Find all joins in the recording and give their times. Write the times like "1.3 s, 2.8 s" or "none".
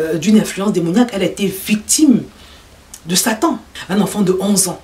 3.7 s

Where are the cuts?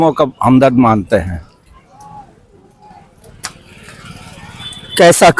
none

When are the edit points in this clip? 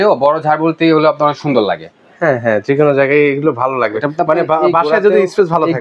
none

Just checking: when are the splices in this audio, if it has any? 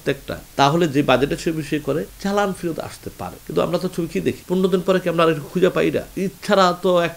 4.4 s, 6.1 s

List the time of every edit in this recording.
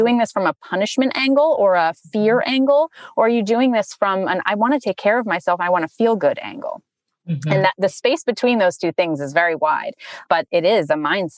10.3 s

